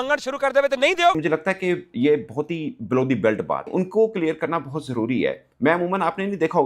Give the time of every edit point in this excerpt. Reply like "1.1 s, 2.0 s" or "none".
1.1 s, 3.7 s

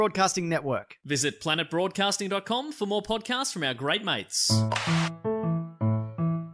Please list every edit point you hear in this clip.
4.5 s

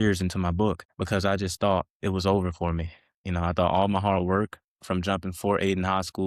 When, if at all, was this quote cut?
0.9 s

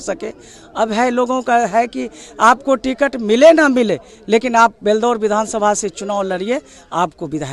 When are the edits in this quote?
none

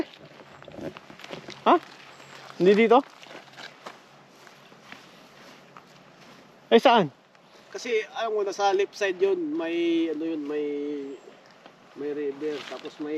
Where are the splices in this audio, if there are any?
none

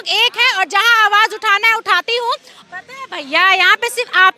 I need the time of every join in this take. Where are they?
2.5 s

